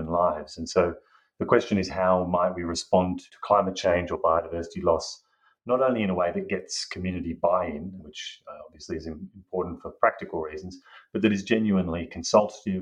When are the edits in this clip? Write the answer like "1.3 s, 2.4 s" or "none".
3.3 s, 8.0 s